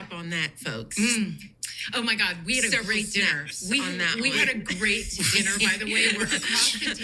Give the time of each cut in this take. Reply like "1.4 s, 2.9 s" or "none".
1.8 s

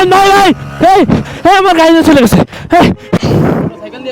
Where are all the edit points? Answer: 3.0 s

